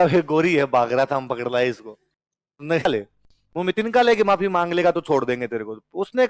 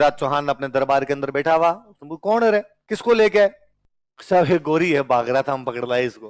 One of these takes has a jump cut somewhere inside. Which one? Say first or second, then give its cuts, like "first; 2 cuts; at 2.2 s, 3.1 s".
first; 1 cut; at 2.9 s